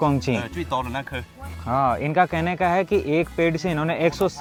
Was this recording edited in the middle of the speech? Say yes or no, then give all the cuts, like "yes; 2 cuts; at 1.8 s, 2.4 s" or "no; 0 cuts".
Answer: no; 0 cuts